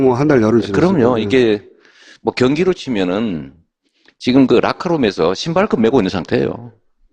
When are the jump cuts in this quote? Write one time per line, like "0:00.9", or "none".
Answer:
0:05.4